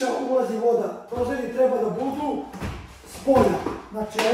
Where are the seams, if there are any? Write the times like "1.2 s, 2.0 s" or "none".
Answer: none